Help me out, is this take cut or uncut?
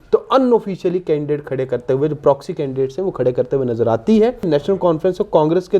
cut